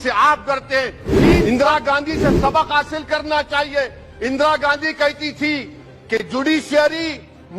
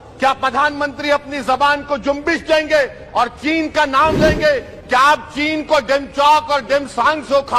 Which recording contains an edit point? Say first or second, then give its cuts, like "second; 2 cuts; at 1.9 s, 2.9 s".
first; 1 cut; at 1.4 s